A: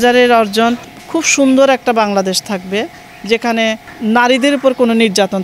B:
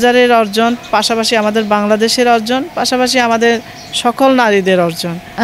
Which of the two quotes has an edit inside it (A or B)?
A